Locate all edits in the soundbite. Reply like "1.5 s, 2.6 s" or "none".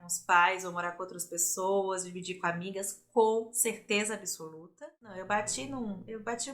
4.8 s